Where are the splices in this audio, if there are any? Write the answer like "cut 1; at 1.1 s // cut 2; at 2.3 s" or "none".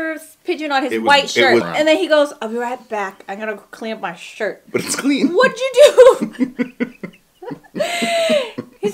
cut 1; at 1.7 s // cut 2; at 4.6 s